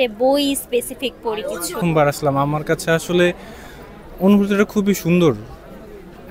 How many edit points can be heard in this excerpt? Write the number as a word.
one